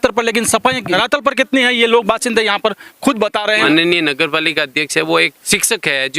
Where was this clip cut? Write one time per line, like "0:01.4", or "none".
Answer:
0:03.6

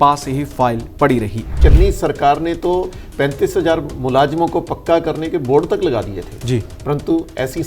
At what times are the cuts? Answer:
0:01.5

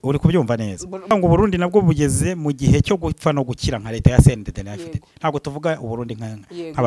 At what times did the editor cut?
0:01.1

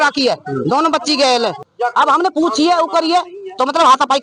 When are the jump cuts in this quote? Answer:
0:01.6

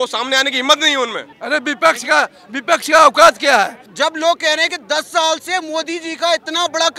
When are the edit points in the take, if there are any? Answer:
0:01.3
0:03.8

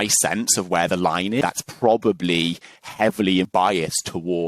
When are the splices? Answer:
0:01.4
0:03.5

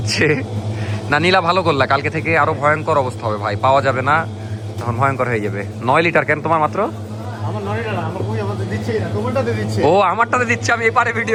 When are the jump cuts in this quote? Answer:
none

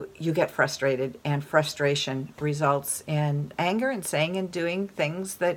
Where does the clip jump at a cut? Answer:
0:03.5

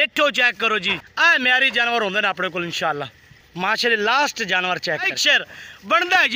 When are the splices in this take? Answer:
0:05.2

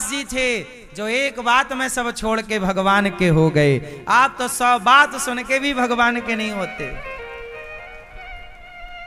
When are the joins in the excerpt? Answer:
none

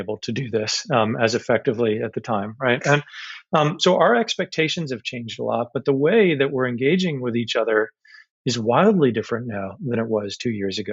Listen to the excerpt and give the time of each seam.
none

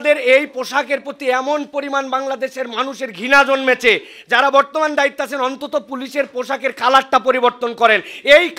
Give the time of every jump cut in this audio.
none

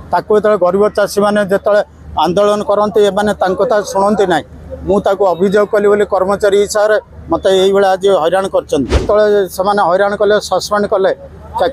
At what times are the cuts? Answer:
0:09.0

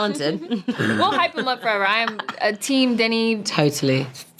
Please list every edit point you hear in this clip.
none

